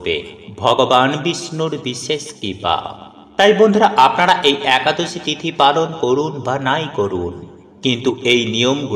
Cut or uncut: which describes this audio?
uncut